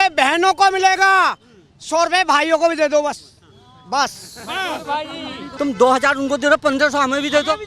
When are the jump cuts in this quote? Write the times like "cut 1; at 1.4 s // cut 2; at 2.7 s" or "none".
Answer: cut 1; at 5.4 s